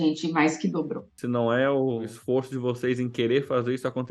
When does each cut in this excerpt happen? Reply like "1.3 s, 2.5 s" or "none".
1.1 s, 2.1 s